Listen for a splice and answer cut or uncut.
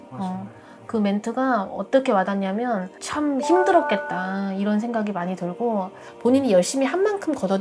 cut